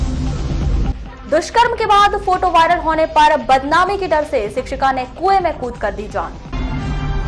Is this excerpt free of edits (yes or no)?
no